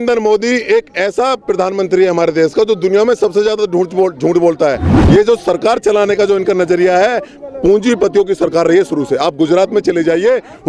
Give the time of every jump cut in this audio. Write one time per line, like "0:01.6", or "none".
0:04.9